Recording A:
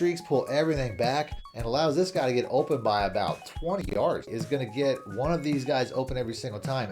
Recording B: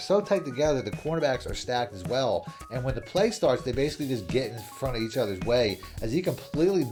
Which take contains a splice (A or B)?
A